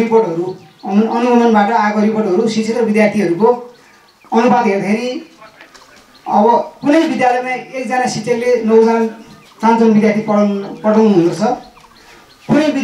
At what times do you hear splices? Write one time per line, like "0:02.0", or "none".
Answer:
none

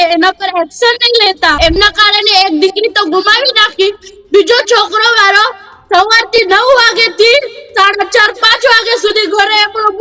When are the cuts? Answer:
0:01.6

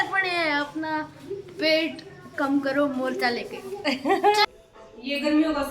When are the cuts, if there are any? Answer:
0:04.5

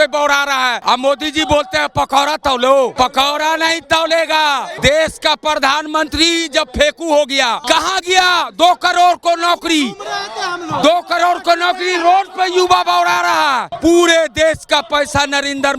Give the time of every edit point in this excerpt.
0:00.8
0:02.9
0:04.7
0:07.6
0:13.7

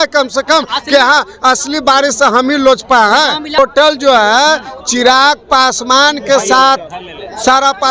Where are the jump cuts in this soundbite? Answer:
0:03.6

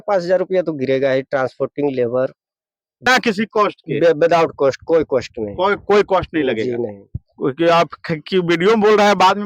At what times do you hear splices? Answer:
0:03.1

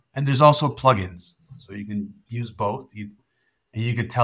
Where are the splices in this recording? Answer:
0:03.2

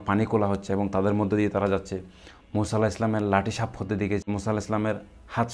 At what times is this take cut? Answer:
0:04.2

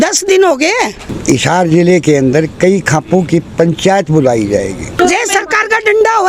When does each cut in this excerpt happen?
0:01.1
0:05.0

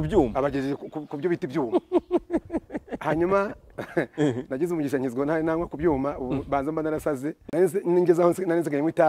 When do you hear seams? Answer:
0:07.3

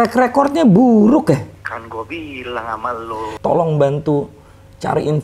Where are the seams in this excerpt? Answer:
0:01.6
0:03.3

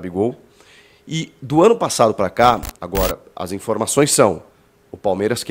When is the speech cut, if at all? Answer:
0:02.8

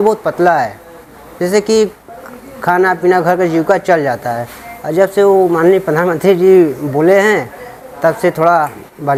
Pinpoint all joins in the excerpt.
none

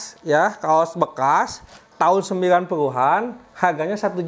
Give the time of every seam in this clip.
none

